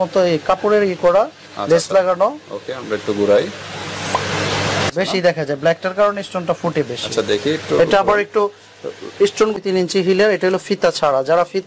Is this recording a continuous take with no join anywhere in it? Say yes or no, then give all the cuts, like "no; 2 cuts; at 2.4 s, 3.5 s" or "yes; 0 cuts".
no; 2 cuts; at 4.9 s, 9.6 s